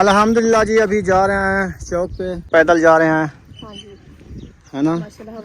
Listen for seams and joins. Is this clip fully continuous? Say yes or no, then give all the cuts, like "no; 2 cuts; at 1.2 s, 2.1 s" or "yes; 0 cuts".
no; 1 cut; at 2.5 s